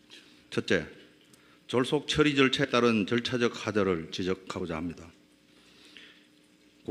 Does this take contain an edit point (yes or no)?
yes